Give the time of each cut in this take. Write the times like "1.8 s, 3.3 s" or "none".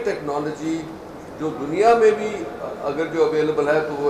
none